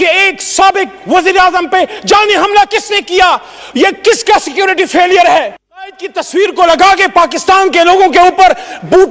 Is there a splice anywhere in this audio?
yes; 1 cut; at 5.5 s

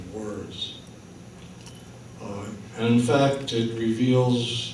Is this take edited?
no; 0 cuts

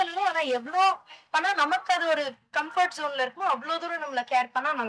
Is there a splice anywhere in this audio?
no; 0 cuts

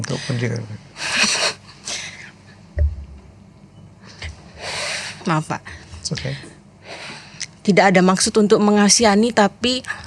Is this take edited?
no; 0 cuts

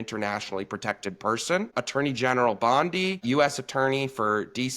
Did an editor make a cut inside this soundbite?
yes; 2 cuts; at 1.7 s, 3.2 s

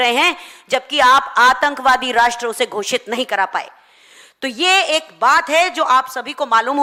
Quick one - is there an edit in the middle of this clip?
no; 0 cuts

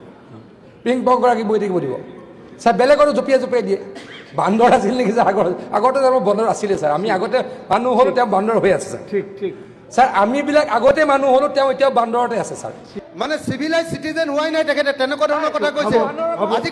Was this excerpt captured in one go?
no; 1 cut; at 13.0 s

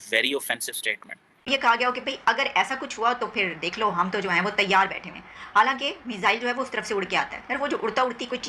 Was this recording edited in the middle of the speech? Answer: yes; 1 cut; at 1.5 s

